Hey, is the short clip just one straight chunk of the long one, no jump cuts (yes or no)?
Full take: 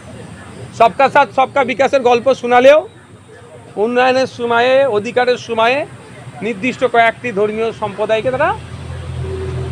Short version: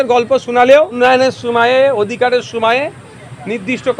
no